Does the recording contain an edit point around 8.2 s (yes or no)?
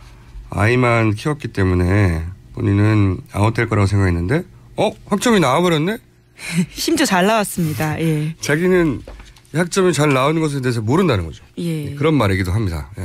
yes